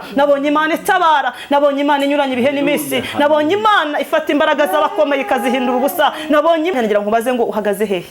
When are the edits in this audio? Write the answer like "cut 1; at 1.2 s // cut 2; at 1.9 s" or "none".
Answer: cut 1; at 6.7 s